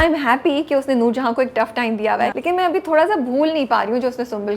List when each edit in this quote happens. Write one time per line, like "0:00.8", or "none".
0:02.4

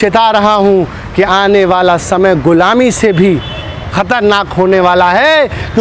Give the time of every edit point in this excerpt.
none

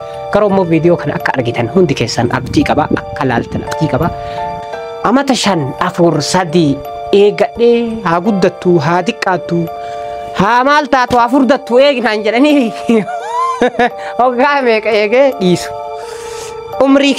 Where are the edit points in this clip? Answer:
0:04.5

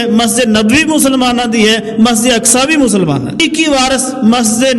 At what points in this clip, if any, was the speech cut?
0:03.4

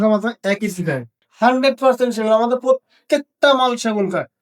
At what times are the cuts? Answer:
0:01.2

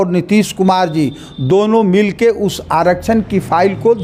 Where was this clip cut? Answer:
none

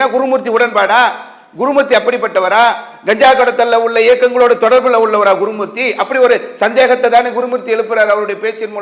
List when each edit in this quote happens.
none

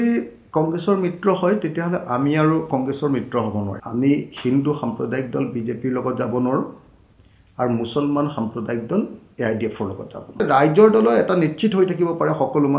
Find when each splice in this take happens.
0:03.8
0:10.4

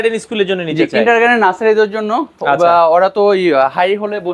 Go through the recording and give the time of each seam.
none

